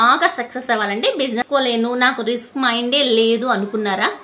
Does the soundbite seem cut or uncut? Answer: cut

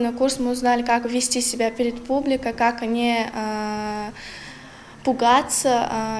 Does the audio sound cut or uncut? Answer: uncut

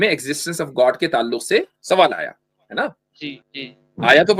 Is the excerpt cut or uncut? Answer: cut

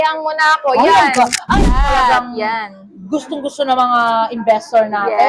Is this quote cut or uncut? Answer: cut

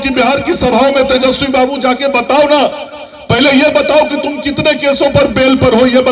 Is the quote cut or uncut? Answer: uncut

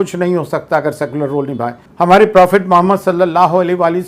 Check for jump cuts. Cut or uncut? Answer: cut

